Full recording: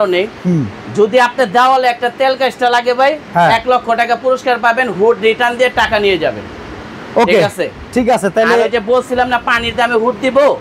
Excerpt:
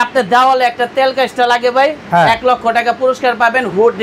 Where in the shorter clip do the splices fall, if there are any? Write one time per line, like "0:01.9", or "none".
none